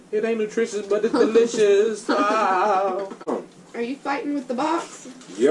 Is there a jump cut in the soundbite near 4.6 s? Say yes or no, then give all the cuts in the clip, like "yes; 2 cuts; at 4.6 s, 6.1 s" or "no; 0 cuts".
no; 1 cut; at 3.3 s